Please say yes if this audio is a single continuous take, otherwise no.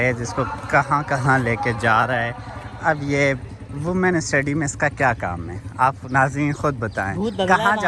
yes